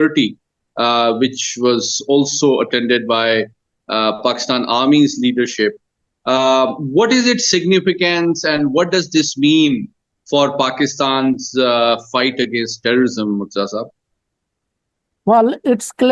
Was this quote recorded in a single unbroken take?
yes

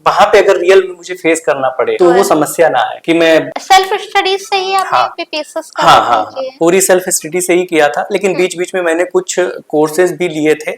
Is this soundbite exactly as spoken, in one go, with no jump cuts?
no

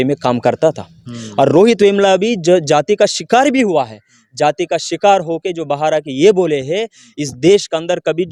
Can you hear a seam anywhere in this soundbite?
no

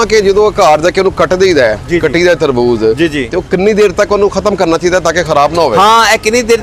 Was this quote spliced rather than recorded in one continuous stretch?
no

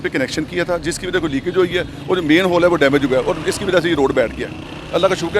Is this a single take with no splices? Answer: yes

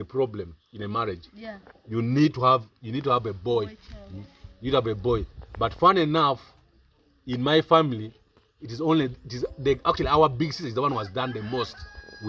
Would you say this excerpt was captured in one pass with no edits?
yes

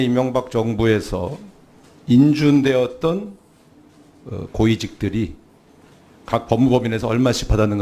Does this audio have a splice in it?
yes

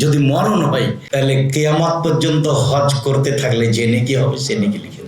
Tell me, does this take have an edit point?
yes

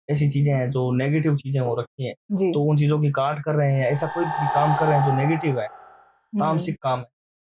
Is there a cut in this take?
no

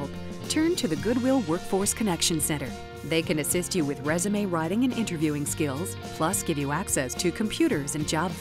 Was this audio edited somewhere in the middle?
no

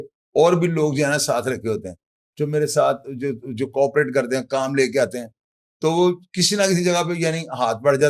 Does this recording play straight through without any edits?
yes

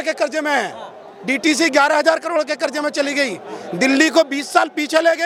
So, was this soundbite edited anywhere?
no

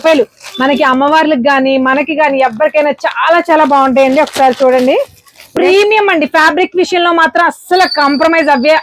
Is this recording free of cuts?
no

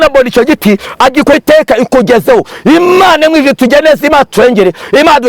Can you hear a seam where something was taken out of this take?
yes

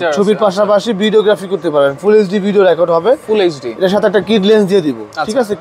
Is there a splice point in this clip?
no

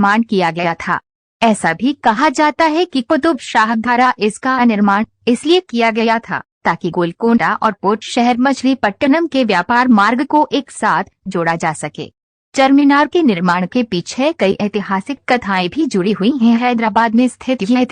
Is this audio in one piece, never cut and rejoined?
no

